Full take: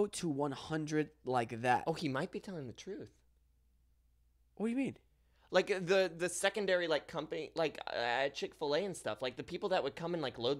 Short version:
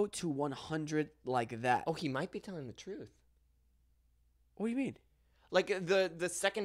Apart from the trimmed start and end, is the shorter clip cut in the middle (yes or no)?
no